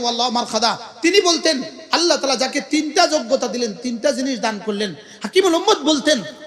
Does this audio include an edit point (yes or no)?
no